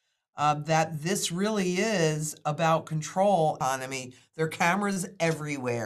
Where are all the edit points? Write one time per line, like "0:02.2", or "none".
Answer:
0:03.6